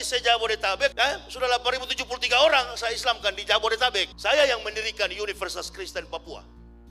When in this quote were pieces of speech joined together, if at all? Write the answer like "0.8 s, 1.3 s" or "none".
0.9 s, 4.1 s

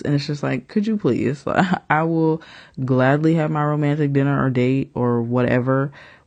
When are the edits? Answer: none

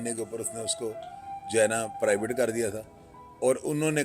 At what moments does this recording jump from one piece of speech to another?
none

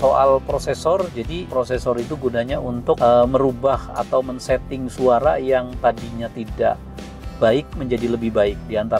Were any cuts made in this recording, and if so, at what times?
1.5 s, 3.0 s

